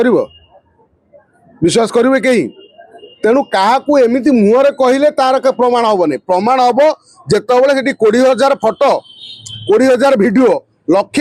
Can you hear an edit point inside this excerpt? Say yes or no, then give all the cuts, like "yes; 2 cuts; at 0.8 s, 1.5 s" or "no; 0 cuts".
no; 0 cuts